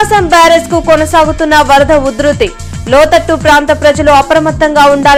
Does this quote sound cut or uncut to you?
uncut